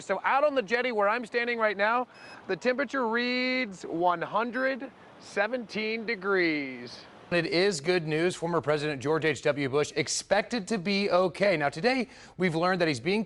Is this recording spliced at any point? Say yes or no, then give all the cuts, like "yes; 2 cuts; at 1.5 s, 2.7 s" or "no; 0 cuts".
yes; 1 cut; at 7.3 s